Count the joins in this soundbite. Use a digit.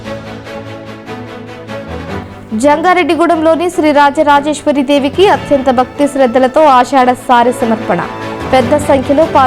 1